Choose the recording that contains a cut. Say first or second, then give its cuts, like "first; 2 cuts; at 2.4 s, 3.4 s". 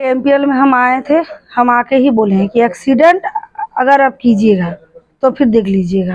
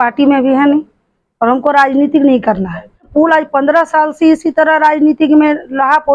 second; 1 cut; at 3.1 s